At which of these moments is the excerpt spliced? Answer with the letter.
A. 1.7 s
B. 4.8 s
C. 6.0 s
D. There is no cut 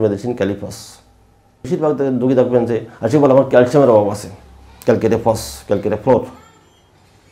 A